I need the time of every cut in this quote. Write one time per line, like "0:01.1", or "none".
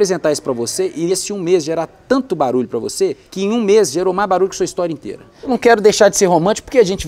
0:01.1
0:03.3
0:05.5